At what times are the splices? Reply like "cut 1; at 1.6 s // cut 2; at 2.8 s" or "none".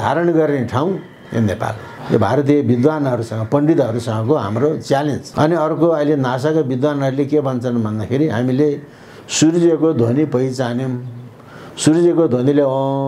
cut 1; at 1.9 s // cut 2; at 5.2 s